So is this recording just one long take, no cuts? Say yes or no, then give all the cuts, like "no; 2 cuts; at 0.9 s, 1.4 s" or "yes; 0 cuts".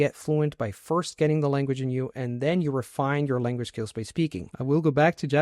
no; 1 cut; at 4.5 s